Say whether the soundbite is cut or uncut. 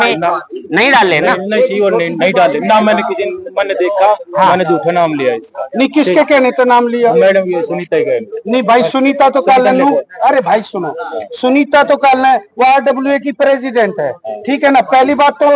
uncut